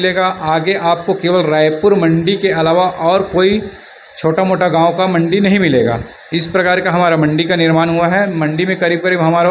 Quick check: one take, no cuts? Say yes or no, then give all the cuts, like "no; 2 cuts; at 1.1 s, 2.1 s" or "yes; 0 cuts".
yes; 0 cuts